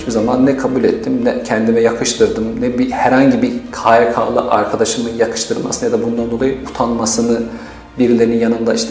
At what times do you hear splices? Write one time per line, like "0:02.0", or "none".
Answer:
none